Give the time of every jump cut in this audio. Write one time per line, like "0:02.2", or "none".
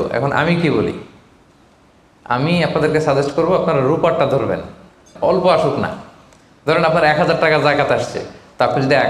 0:05.1